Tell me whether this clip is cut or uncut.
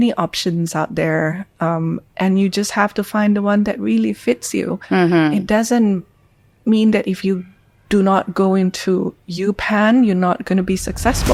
uncut